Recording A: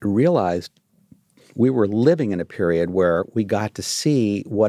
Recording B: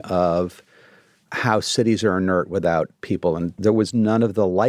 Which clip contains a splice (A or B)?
B